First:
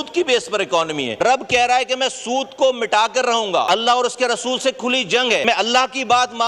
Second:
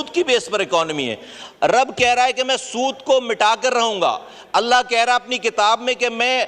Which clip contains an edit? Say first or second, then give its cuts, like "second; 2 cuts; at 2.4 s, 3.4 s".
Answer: first; 3 cuts; at 1.2 s, 3.7 s, 5.4 s